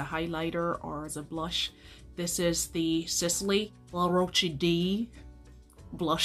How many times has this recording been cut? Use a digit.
1